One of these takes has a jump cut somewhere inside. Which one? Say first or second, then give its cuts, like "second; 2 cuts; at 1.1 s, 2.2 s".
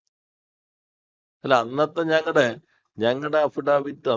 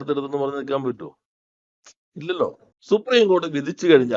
second; 1 cut; at 2.7 s